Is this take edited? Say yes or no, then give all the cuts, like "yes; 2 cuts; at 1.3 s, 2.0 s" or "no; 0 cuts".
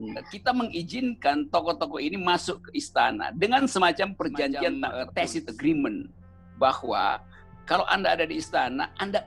yes; 1 cut; at 4.9 s